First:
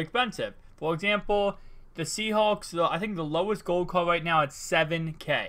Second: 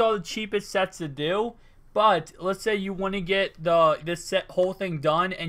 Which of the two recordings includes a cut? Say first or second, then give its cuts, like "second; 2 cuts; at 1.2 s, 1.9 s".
second; 1 cut; at 4.3 s